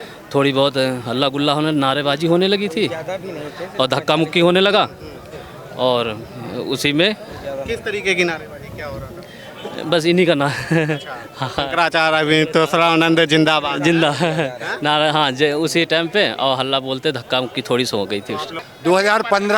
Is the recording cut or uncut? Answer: cut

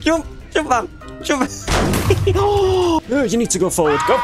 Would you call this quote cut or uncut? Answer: cut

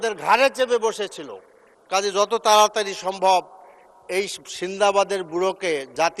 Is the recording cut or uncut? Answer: uncut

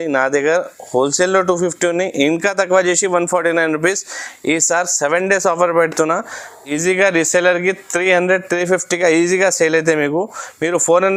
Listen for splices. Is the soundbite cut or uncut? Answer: uncut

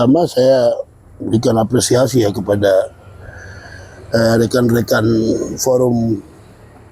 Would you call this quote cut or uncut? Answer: uncut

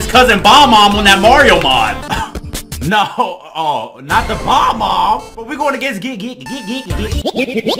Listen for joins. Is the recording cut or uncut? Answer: uncut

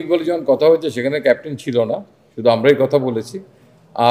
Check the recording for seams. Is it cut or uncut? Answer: uncut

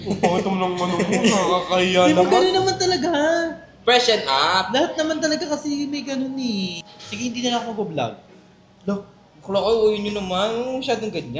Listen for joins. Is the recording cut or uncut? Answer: cut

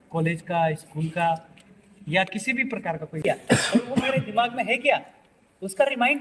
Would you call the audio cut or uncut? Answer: cut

